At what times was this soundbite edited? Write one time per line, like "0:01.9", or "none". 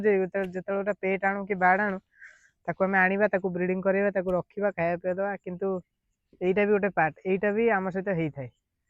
none